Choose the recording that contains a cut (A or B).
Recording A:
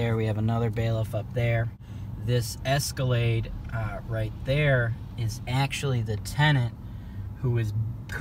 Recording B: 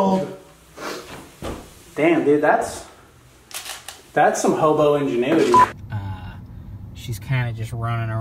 B